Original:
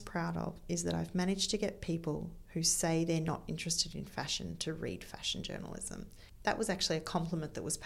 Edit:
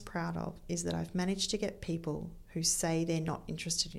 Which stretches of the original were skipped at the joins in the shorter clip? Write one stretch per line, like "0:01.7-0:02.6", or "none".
none

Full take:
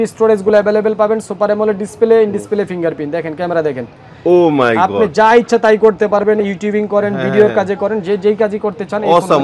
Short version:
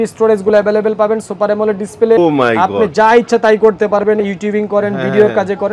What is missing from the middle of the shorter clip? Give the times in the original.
0:02.2-0:04.4

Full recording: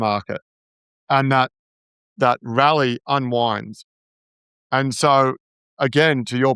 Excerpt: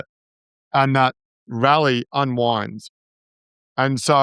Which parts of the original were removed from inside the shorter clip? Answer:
0:01.9-0:02.4

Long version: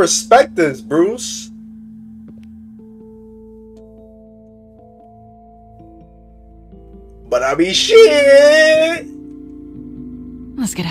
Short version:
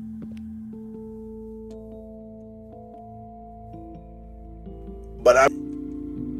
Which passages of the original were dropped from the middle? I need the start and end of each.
0:07.5-0:09.0

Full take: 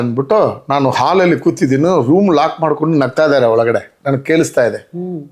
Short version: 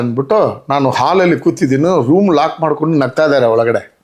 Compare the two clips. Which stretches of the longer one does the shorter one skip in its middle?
none

